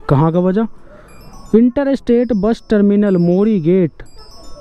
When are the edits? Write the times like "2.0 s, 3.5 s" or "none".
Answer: none